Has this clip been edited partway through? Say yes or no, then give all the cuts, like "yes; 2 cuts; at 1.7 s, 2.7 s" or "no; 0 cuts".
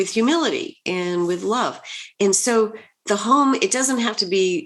yes; 1 cut; at 2.1 s